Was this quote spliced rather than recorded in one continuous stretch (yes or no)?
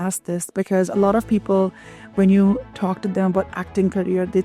no